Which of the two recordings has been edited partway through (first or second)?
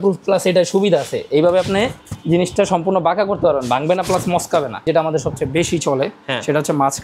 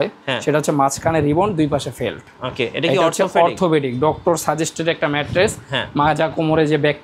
first